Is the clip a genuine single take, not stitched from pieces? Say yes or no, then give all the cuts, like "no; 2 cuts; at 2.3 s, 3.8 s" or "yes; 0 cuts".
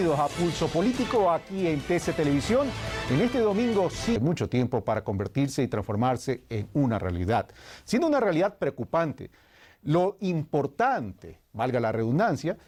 yes; 0 cuts